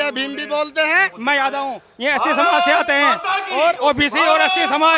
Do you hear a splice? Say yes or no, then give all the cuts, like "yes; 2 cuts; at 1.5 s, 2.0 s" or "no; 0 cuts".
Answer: yes; 2 cuts; at 1.1 s, 3.8 s